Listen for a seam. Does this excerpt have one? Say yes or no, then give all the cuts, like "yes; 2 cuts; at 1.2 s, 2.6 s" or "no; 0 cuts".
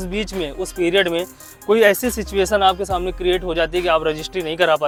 no; 0 cuts